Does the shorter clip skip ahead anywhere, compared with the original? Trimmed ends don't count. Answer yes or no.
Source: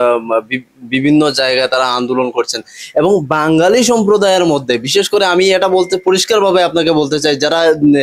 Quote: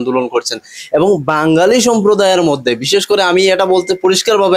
no